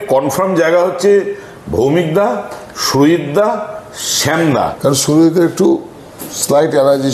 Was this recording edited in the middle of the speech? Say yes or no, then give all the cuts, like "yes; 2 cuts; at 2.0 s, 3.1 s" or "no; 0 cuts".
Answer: yes; 1 cut; at 4.7 s